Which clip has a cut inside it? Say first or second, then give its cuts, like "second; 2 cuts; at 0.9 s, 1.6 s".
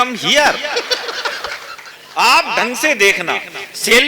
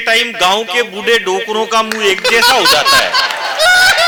first; 1 cut; at 1.7 s